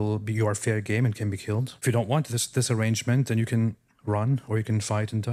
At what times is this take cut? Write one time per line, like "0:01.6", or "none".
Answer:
0:01.7